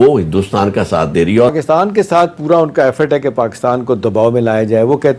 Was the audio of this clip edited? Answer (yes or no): yes